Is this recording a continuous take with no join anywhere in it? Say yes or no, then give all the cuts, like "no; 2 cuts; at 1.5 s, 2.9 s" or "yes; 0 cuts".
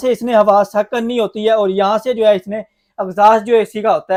yes; 0 cuts